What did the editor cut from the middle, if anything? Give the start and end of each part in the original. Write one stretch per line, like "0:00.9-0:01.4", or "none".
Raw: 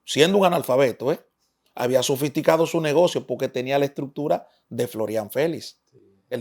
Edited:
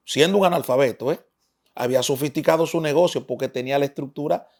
none